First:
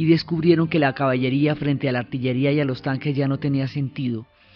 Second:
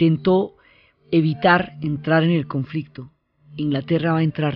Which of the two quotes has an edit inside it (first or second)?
second